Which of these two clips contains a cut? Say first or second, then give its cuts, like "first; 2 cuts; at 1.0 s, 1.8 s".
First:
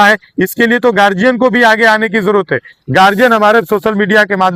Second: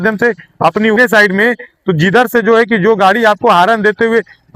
second; 1 cut; at 1.0 s